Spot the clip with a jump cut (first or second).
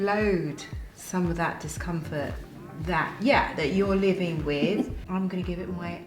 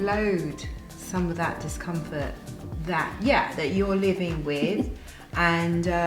first